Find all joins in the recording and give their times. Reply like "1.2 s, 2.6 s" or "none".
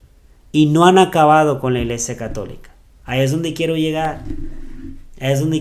none